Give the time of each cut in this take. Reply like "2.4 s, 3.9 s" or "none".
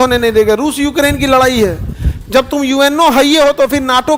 none